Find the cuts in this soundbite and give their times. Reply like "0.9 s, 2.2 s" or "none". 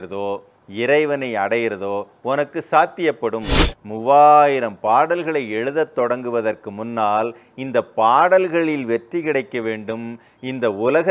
3.5 s